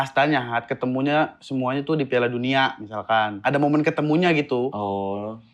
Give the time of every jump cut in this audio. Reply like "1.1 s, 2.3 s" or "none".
3.3 s, 4.7 s